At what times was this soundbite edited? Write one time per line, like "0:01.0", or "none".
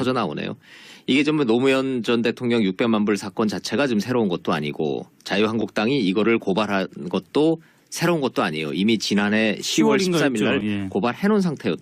0:08.7